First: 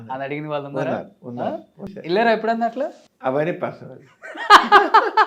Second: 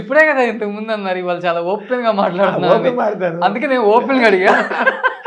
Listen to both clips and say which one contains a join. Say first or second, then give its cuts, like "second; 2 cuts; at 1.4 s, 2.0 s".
first; 2 cuts; at 1.9 s, 3.0 s